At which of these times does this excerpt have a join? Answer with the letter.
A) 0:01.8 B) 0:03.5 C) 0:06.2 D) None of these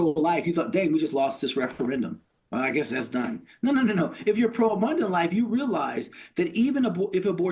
D